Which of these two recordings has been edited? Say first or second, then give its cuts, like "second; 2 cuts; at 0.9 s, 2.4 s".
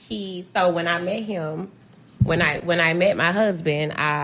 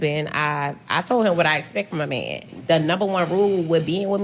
first; 1 cut; at 2.2 s